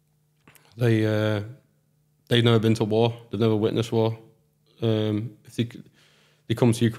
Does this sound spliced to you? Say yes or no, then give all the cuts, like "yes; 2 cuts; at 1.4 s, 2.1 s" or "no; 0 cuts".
no; 0 cuts